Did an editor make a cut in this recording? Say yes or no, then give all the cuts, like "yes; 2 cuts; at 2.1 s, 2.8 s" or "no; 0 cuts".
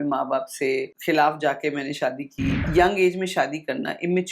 yes; 2 cuts; at 0.9 s, 2.6 s